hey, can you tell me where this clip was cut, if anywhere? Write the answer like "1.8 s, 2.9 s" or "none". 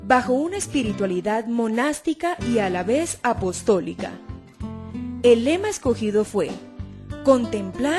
1.2 s